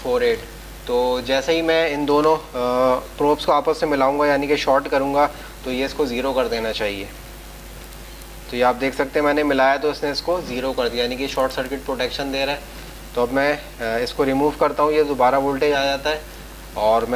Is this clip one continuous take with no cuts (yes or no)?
yes